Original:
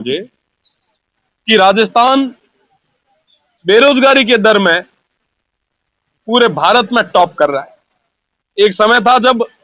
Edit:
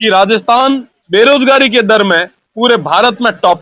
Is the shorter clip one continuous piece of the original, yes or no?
no